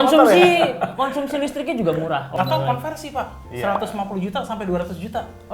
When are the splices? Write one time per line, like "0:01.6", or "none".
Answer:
0:02.3